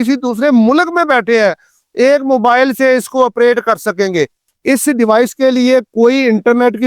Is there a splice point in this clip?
yes; 1 cut; at 4.5 s

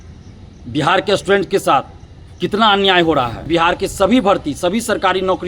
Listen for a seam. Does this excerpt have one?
yes; 1 cut; at 3.4 s

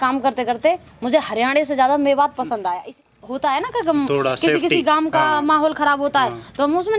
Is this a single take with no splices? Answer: no; 1 cut; at 2.9 s

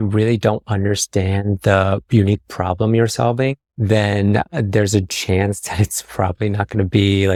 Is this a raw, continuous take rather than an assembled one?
yes; 0 cuts

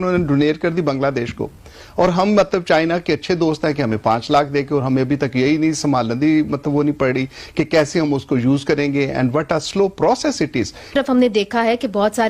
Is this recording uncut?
no; 1 cut; at 10.9 s

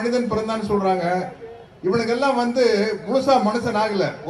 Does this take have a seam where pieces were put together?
no; 0 cuts

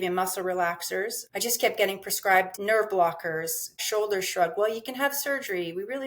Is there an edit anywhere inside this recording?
yes; 3 cuts; at 1.2 s, 2.6 s, 3.8 s

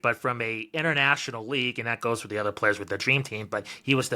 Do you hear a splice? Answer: no; 0 cuts

